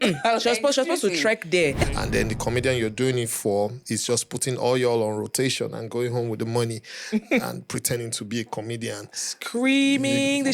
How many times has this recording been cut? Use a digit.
1